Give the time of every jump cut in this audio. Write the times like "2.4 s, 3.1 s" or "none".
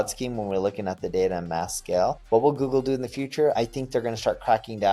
2.2 s, 3.6 s